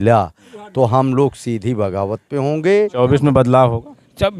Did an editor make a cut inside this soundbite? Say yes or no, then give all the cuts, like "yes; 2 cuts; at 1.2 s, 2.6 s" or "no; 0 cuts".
yes; 1 cut; at 2.9 s